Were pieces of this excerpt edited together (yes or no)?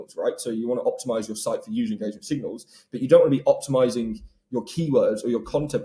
no